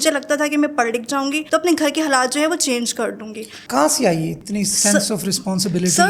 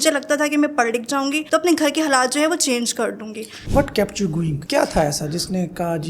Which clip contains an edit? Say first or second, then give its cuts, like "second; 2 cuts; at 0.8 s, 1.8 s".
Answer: second; 1 cut; at 3.5 s